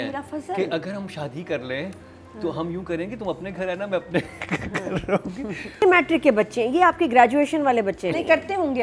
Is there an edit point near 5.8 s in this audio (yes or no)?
yes